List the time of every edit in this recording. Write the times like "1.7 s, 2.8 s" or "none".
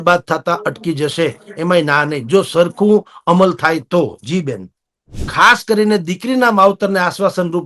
5.2 s